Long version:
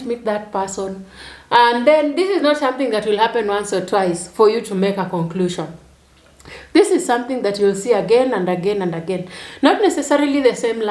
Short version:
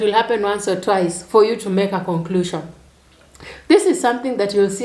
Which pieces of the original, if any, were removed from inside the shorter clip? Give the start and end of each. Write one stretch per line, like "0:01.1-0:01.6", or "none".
none